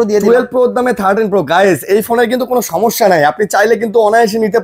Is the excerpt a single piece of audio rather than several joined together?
yes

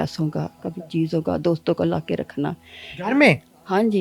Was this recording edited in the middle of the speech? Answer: no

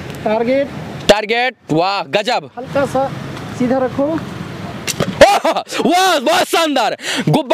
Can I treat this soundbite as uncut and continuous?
yes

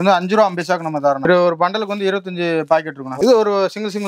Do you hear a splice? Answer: no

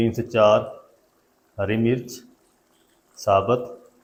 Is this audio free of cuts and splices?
yes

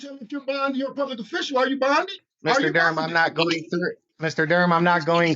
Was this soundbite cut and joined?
yes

